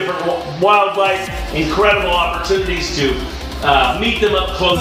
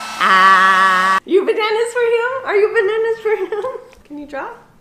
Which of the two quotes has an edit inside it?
second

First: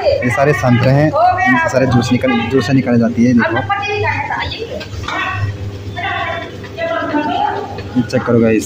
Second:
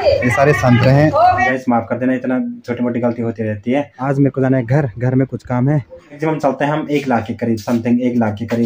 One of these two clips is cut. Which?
second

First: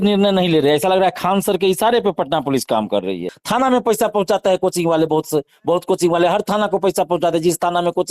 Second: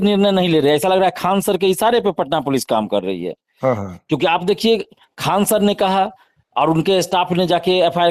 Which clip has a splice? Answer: first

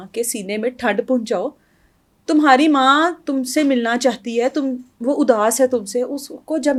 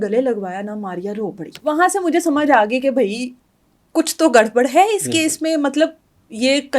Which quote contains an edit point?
second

